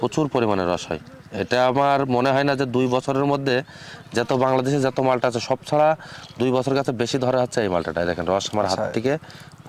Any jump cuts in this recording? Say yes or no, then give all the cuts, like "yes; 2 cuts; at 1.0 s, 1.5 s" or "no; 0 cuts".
no; 0 cuts